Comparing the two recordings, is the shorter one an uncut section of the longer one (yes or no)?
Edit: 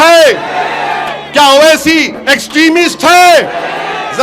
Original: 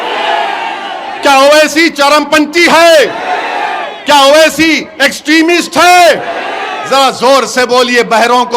yes